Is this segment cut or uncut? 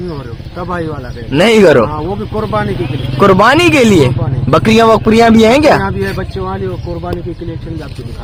uncut